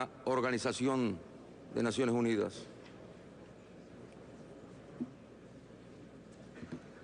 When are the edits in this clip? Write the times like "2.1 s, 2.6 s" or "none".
3.9 s